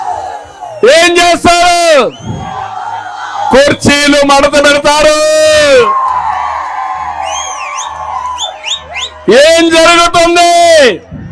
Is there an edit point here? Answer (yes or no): no